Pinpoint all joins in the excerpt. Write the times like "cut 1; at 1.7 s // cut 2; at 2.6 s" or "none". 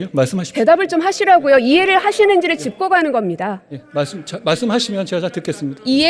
none